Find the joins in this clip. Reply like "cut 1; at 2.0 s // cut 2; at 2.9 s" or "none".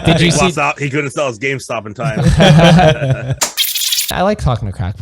cut 1; at 3.6 s